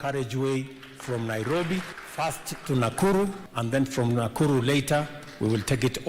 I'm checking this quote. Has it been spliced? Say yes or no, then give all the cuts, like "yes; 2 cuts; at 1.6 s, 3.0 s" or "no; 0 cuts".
yes; 2 cuts; at 2.0 s, 3.5 s